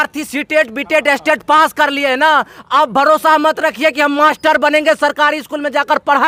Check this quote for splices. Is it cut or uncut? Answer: uncut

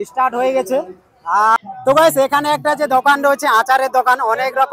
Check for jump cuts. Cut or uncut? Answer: cut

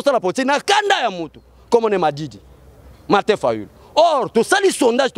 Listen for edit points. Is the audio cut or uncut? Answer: uncut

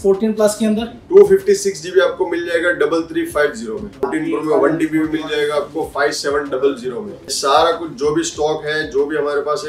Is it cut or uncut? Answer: cut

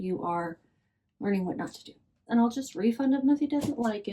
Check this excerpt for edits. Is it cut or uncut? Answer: cut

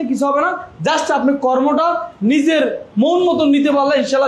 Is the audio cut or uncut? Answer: uncut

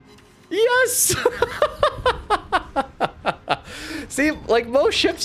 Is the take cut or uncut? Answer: uncut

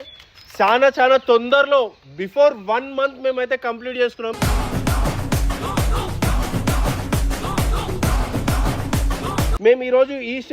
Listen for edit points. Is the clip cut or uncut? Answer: cut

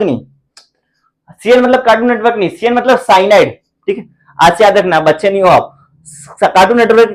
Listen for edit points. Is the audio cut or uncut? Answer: uncut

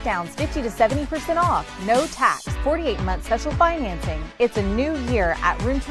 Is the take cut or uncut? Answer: uncut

